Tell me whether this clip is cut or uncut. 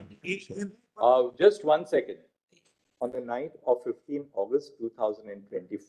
uncut